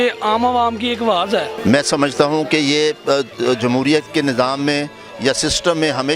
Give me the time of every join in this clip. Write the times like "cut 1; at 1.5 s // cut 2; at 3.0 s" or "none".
cut 1; at 1.5 s